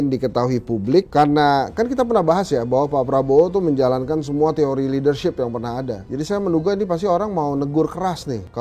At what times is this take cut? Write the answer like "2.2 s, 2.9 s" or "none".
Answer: none